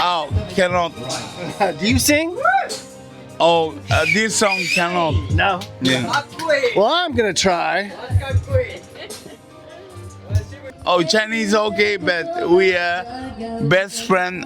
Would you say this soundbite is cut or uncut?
cut